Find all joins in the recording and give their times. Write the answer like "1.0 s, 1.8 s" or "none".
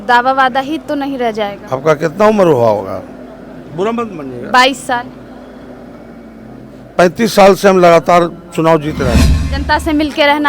9.2 s